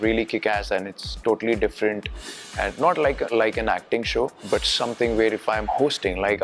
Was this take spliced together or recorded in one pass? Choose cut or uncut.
cut